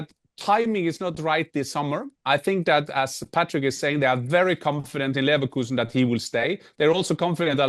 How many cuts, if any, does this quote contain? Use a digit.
0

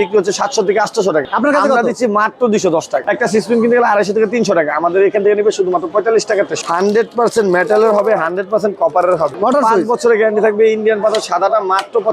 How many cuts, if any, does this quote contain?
4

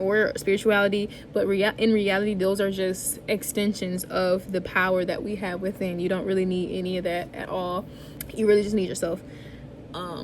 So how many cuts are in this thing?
1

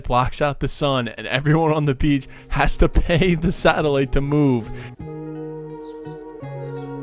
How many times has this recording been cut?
1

